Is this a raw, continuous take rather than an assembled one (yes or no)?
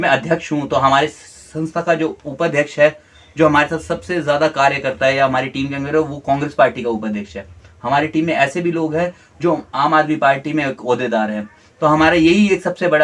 yes